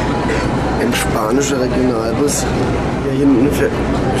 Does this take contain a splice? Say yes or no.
yes